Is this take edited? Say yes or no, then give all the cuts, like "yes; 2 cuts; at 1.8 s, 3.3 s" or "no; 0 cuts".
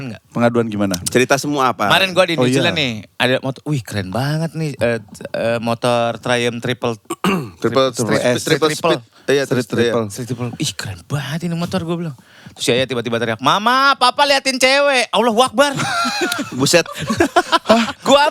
no; 0 cuts